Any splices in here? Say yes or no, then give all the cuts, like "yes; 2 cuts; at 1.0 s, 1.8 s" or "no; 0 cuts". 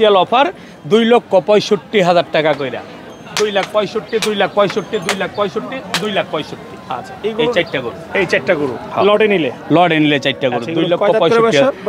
no; 0 cuts